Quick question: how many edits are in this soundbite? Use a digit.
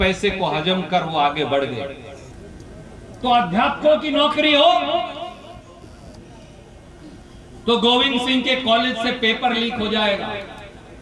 1